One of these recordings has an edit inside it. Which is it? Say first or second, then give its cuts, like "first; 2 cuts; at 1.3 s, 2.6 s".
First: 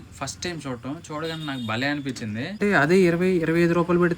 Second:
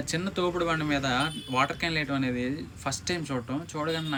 first; 1 cut; at 2.6 s